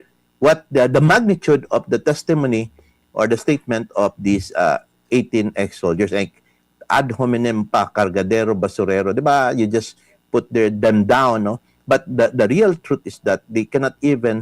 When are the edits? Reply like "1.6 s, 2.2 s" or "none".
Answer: none